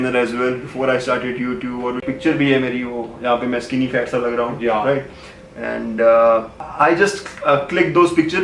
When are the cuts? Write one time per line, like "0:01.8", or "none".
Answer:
0:02.0
0:05.6
0:06.6